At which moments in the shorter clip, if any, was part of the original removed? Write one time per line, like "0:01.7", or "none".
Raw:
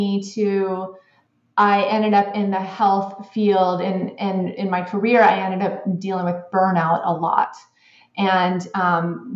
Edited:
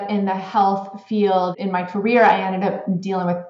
0:01.5